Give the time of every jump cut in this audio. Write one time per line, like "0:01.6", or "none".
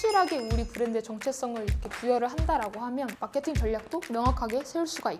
none

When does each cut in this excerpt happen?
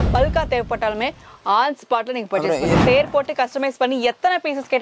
0:02.8

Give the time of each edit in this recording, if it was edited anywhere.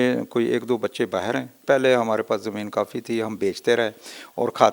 0:01.5

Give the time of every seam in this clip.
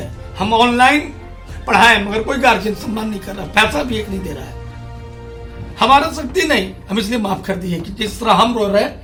none

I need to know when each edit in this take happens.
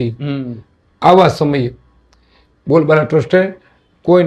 none

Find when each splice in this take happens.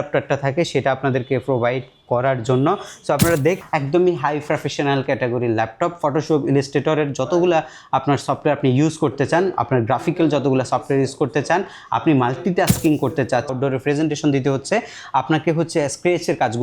0:03.6
0:13.5

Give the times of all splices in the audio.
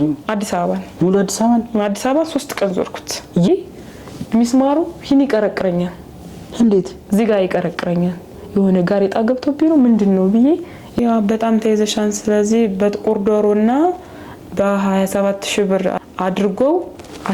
0:03.5
0:11.0

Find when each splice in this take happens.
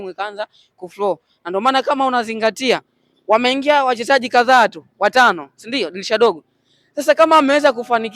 none

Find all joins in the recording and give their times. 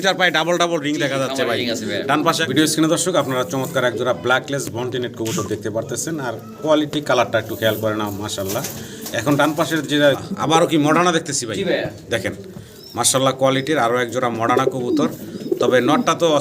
0:02.4
0:10.2

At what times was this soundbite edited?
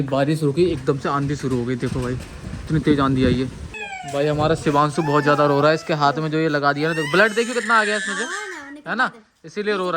0:02.6
0:03.8

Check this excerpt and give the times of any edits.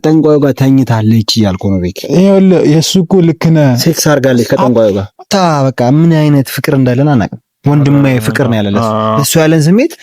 0:05.3

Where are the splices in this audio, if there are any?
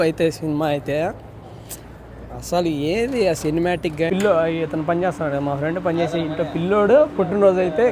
0:04.1

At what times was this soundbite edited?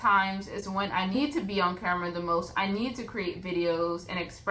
0:01.1

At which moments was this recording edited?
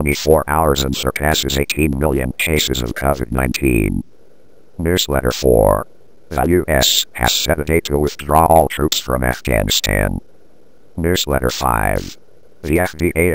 0:04.7
0:10.9

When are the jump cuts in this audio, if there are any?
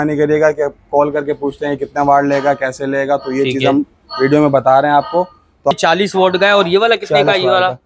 0:05.7

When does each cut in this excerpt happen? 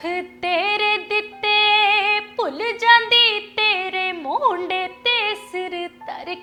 none

